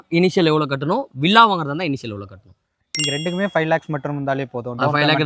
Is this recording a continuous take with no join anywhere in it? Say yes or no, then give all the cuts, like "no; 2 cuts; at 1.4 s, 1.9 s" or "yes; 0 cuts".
yes; 0 cuts